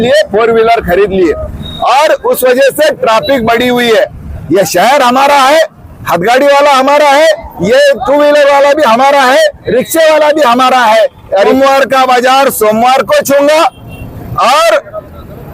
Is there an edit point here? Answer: yes; 2 cuts; at 4.3 s, 11.5 s

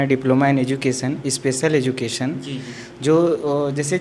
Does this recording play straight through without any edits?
yes; 0 cuts

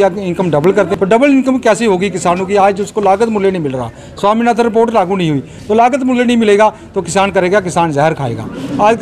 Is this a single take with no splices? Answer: no; 1 cut; at 0.9 s

